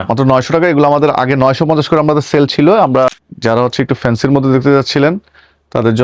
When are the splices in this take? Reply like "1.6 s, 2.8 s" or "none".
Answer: 3.1 s